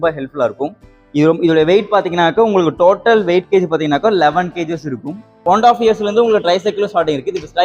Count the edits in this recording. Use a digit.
1